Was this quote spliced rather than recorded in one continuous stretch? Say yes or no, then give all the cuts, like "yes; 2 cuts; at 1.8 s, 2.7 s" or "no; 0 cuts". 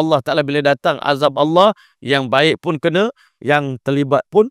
no; 0 cuts